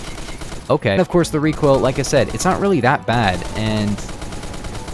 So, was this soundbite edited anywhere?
yes; 1 cut; at 1.0 s

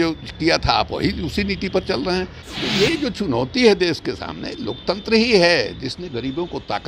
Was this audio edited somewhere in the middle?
yes; 1 cut; at 2.4 s

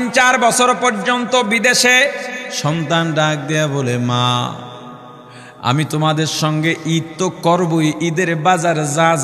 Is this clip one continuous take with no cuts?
no; 1 cut; at 2.5 s

